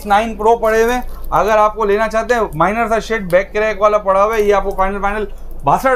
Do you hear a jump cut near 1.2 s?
no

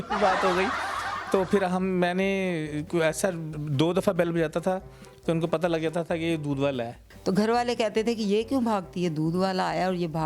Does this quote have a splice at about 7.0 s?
yes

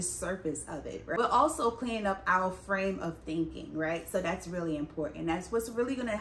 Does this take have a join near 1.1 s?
yes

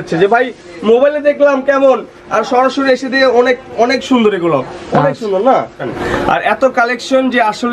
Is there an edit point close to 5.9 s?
yes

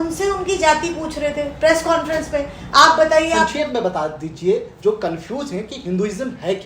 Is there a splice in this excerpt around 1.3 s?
no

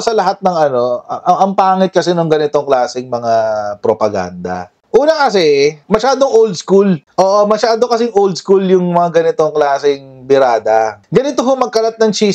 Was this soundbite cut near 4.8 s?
yes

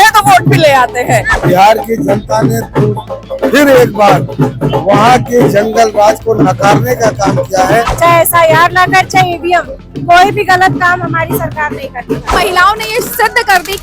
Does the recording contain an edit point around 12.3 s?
yes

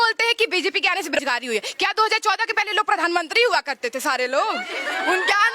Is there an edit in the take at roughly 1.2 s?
yes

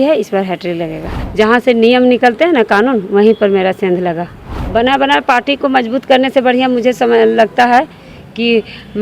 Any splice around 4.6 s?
yes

